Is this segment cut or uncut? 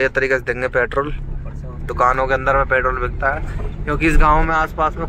uncut